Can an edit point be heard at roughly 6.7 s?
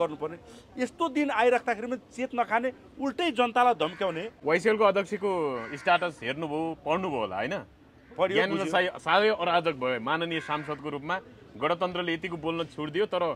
no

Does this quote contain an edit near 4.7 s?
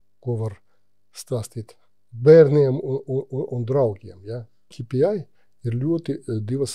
yes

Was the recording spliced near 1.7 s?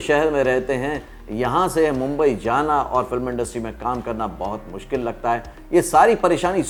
no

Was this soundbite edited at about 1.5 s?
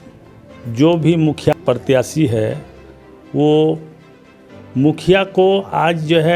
yes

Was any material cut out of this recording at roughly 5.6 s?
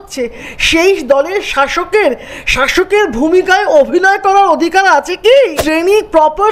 yes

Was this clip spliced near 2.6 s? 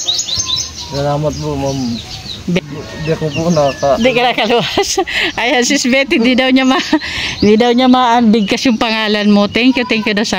yes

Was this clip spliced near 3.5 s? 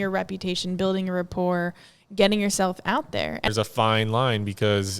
yes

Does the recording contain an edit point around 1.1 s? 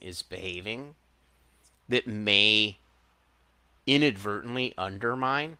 no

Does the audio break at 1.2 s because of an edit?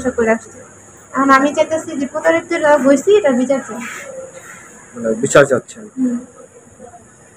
no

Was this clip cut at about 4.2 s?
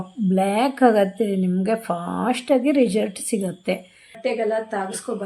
yes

